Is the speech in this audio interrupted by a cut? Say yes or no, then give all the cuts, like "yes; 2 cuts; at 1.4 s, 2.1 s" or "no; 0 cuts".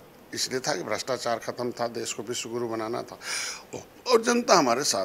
no; 0 cuts